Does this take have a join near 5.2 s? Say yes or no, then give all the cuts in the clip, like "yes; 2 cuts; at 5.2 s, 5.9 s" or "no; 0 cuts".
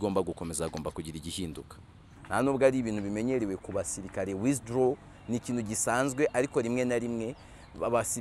no; 1 cut; at 2.1 s